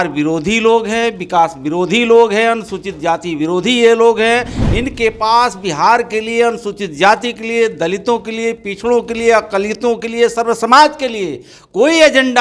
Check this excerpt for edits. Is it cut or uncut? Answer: uncut